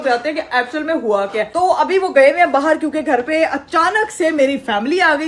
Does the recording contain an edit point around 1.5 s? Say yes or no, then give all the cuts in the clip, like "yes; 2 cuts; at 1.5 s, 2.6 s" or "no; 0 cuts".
no; 0 cuts